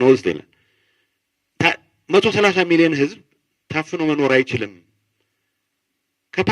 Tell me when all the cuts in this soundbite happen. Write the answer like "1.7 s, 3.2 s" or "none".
none